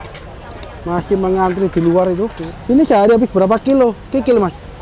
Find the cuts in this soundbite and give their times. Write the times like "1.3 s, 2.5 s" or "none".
2.4 s